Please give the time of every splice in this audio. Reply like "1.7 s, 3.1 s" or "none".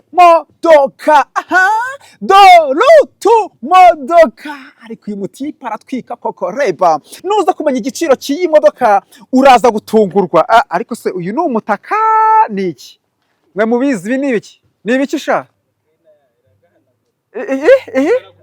7.1 s

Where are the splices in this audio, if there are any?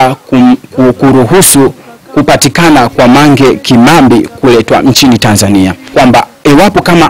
5.8 s

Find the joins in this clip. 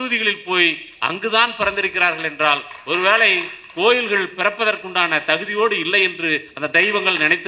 none

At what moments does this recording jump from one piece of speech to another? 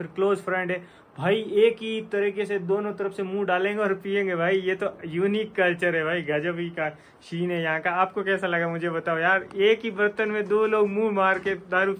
none

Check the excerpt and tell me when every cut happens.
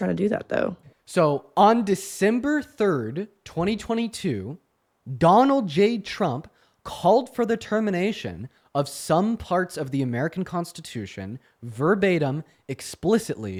none

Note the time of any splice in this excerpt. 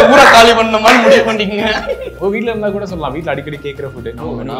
2.1 s

